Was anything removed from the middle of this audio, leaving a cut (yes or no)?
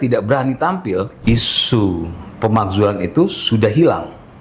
yes